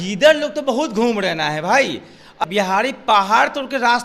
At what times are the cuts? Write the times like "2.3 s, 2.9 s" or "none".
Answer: 2.4 s

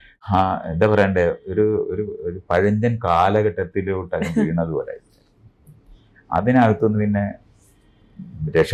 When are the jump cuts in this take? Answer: none

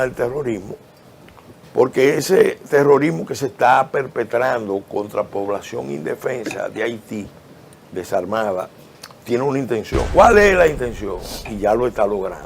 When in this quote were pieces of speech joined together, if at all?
10.1 s

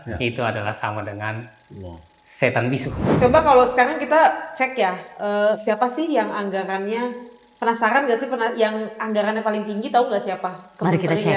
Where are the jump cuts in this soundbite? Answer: 3.1 s

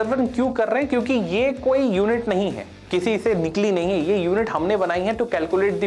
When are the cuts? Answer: none

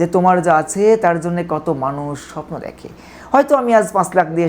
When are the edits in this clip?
none

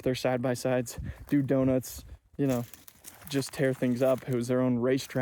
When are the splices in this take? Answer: none

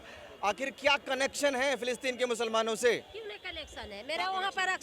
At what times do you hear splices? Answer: none

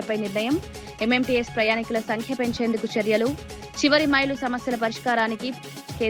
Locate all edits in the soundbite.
none

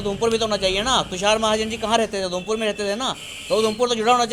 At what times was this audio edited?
none

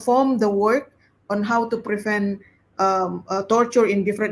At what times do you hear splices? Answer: none

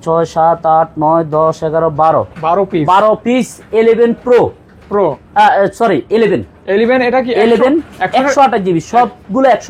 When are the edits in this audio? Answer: none

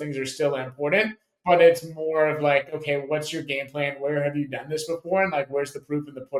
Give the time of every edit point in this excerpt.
none

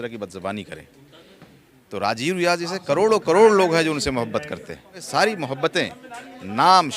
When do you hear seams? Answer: 5.0 s

